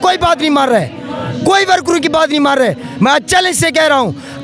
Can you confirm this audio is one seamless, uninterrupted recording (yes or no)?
yes